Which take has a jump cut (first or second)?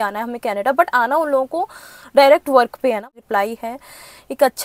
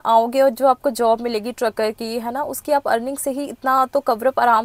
first